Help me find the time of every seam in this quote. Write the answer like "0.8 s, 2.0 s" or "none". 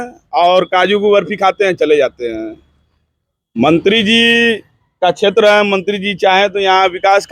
none